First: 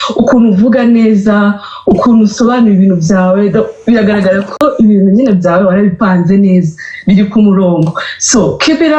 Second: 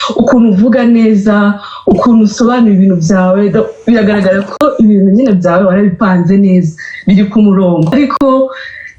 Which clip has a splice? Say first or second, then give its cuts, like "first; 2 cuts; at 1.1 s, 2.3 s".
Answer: second; 1 cut; at 7.9 s